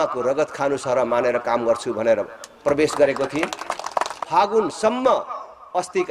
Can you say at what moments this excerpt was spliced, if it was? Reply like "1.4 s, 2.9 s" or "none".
4.2 s